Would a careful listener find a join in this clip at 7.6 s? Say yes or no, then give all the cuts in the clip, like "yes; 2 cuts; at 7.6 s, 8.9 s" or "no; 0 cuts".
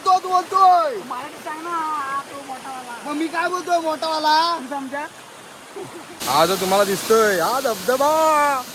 no; 1 cut; at 6.1 s